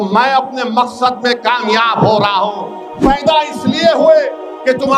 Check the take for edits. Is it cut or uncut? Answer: cut